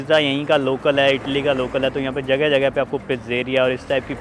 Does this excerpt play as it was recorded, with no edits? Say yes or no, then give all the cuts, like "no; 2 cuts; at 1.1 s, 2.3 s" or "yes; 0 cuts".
yes; 0 cuts